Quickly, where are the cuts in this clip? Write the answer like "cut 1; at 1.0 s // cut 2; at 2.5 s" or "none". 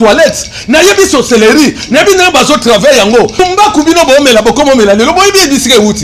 cut 1; at 3.4 s